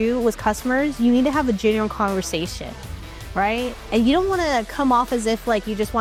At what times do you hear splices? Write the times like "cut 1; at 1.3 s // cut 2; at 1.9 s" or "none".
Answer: none